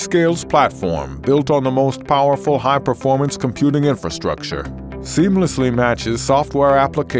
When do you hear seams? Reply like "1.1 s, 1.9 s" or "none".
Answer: 1.1 s

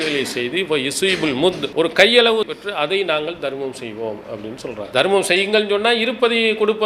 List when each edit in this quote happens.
1.6 s, 2.5 s, 4.8 s

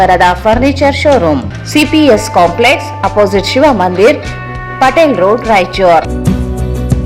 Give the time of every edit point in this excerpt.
1.4 s

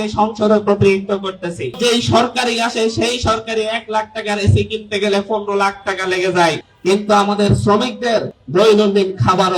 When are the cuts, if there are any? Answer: 1.8 s, 6.7 s, 8.4 s

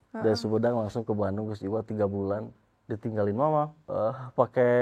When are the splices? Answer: 3.8 s

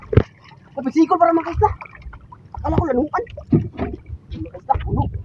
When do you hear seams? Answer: none

